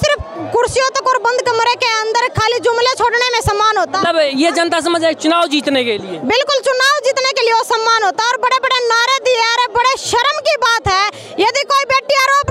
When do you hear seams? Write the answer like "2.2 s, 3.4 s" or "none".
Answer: none